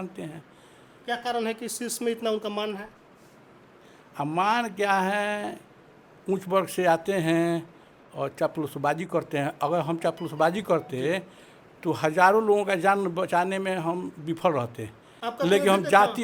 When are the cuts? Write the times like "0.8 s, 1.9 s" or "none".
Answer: none